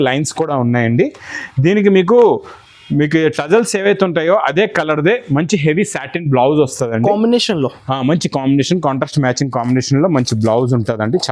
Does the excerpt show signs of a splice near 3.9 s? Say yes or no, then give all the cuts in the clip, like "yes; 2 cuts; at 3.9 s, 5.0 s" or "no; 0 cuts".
no; 0 cuts